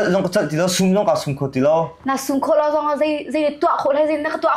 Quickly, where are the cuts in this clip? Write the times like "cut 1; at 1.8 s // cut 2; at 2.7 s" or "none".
none